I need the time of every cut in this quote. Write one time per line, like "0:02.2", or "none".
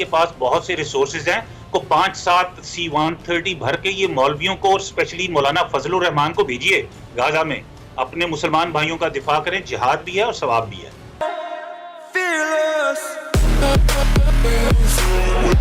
0:11.2